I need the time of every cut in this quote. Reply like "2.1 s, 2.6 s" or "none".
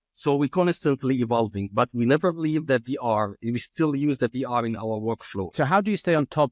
5.5 s